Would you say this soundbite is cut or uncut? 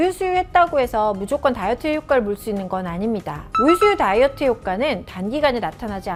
uncut